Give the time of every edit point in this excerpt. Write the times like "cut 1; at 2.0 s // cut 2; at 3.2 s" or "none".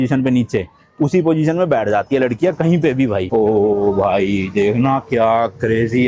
cut 1; at 3.2 s

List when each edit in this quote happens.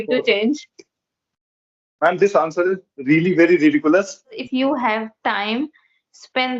cut 1; at 4.4 s

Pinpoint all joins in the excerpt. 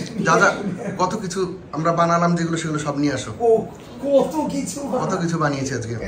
none

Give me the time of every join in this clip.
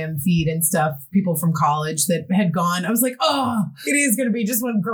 cut 1; at 3.8 s

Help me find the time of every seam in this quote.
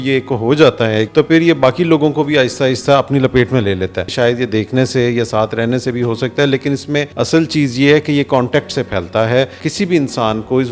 cut 1; at 1.1 s // cut 2; at 4.1 s // cut 3; at 7.1 s // cut 4; at 9.6 s

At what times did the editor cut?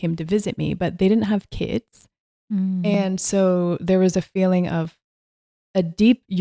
none

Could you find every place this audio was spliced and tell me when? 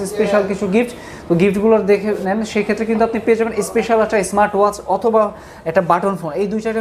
cut 1; at 2.2 s

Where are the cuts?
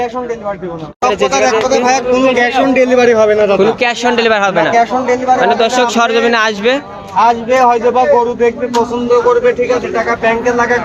cut 1; at 1.0 s

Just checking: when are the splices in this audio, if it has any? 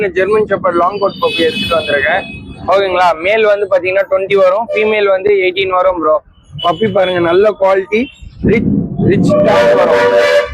none

